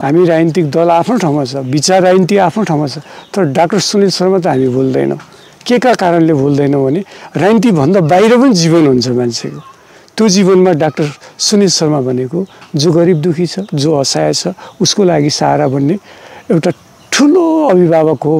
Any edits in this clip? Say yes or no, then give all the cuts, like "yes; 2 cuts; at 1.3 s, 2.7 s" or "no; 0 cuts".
no; 0 cuts